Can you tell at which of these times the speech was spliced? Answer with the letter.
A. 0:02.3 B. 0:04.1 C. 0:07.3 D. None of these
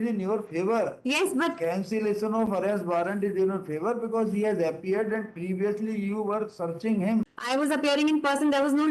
C